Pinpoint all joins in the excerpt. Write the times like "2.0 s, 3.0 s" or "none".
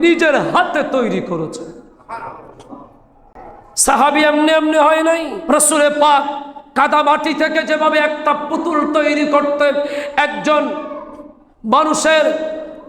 5.4 s